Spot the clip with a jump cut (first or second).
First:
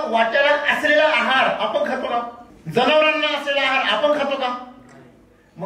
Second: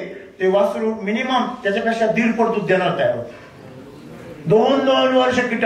second